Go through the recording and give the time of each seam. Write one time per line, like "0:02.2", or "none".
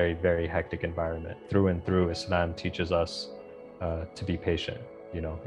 0:01.4